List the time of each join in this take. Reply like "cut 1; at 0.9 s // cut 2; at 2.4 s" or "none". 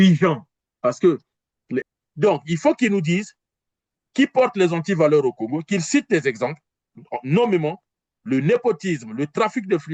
cut 1; at 1.8 s